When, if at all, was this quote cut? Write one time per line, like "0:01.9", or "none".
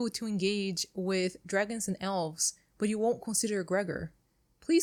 none